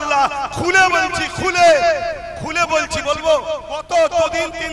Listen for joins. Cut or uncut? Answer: cut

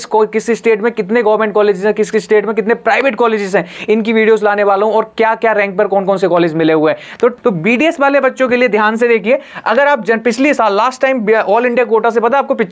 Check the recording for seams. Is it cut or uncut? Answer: cut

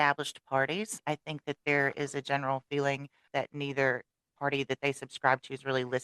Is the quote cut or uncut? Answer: cut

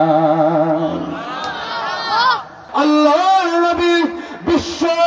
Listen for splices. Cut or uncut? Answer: cut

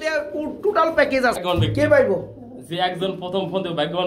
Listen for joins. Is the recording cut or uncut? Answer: cut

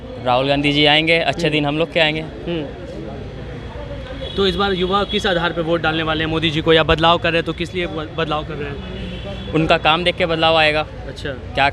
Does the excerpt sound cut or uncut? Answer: uncut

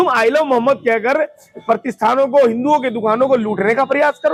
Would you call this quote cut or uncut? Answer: uncut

